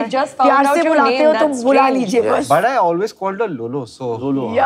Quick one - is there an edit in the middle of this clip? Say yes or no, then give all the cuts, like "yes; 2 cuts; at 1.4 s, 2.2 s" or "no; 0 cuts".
no; 0 cuts